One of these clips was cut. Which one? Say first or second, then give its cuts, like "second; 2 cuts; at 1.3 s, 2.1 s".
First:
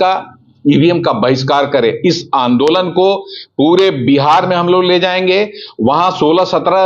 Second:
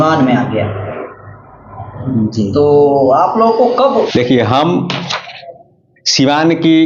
second; 1 cut; at 4.1 s